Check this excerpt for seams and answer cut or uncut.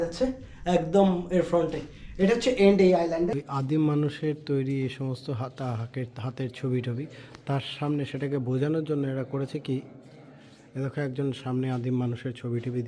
cut